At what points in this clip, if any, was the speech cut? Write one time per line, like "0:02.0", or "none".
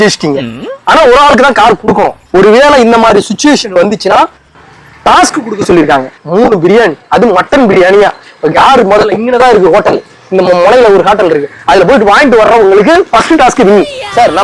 0:02.2
0:06.2